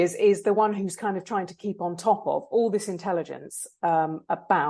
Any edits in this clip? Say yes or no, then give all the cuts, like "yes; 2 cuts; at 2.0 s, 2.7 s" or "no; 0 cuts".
no; 0 cuts